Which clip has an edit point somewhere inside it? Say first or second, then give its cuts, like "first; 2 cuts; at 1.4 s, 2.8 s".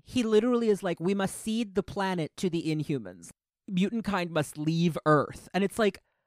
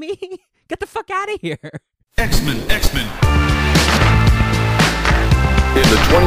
second; 1 cut; at 2.0 s